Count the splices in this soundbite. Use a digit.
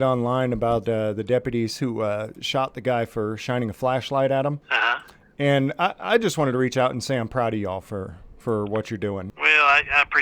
2